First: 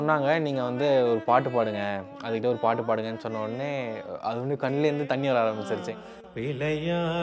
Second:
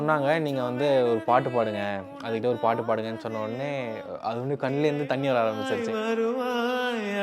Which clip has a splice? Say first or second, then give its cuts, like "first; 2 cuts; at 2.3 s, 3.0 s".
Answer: first; 1 cut; at 5.8 s